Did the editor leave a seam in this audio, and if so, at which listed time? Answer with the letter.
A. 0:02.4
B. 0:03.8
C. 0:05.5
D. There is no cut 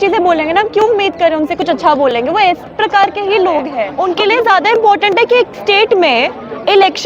B